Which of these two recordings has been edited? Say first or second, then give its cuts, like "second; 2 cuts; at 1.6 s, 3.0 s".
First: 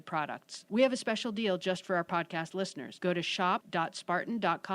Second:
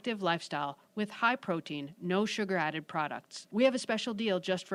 first; 2 cuts; at 2.8 s, 3.7 s